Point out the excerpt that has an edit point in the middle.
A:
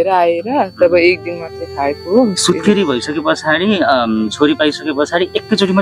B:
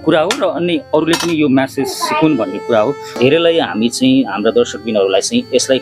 B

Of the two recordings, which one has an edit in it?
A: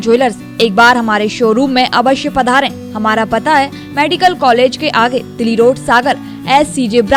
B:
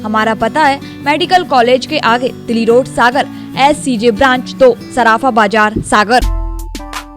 B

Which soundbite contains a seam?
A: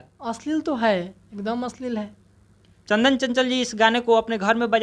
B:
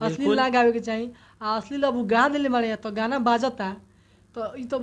A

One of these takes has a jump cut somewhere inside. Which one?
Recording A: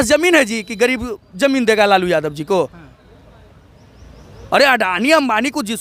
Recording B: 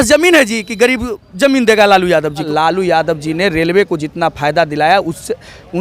B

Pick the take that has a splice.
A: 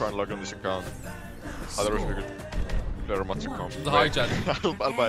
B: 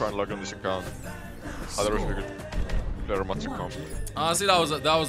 A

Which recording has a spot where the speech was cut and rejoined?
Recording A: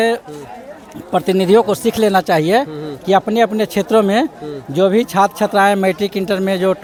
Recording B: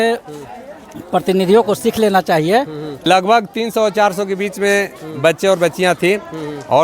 B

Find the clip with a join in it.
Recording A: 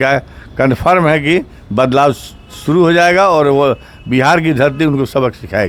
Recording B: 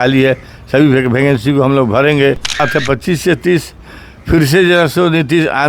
B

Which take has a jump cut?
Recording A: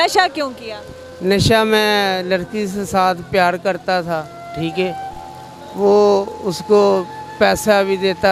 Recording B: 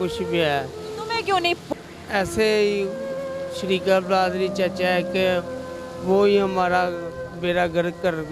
B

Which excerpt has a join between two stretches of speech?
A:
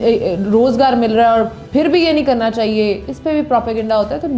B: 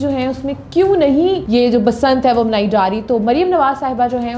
B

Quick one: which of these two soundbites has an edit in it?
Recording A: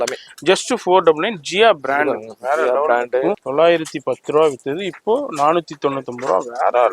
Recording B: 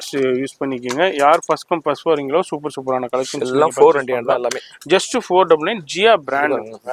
A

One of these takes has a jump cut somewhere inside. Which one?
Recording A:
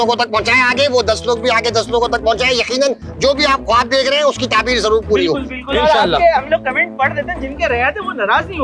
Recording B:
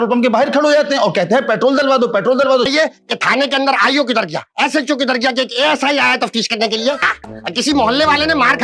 B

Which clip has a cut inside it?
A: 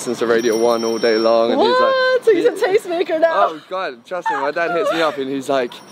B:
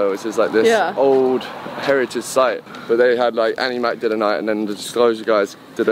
B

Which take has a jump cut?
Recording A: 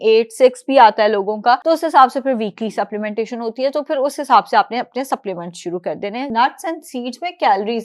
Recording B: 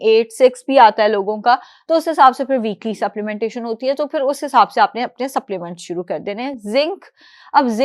A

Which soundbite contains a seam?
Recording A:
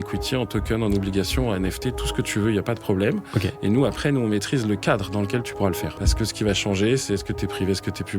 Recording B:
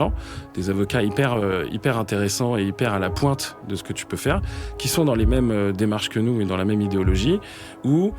A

